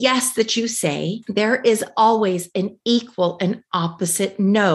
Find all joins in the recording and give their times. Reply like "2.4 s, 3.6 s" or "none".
1.2 s